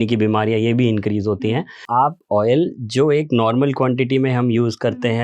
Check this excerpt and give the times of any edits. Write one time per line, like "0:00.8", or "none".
0:01.8